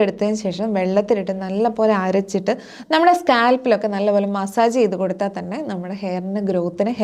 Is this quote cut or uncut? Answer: uncut